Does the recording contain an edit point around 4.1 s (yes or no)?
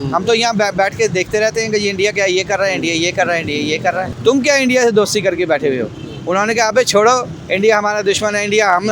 yes